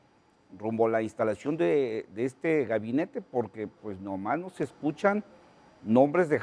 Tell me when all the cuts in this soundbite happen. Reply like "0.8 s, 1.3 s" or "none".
2.7 s